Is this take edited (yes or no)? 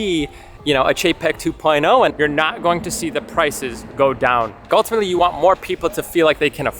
yes